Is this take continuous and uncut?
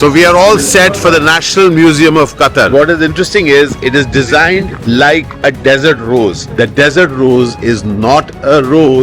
no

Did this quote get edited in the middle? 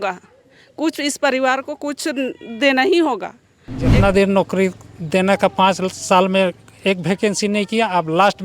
yes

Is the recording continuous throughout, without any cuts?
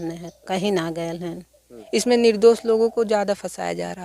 no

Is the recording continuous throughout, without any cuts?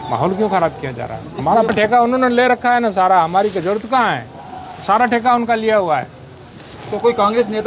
no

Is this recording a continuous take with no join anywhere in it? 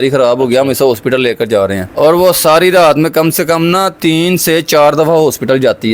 yes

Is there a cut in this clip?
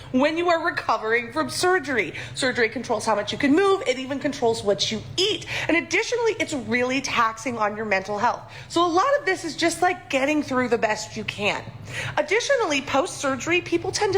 yes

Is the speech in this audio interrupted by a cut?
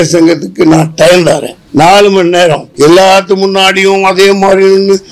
yes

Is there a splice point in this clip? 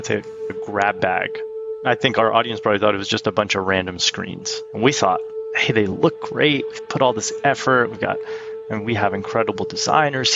yes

